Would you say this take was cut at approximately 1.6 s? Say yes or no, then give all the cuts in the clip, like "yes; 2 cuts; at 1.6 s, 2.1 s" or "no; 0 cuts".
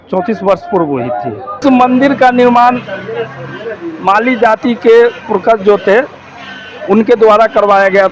yes; 1 cut; at 1.6 s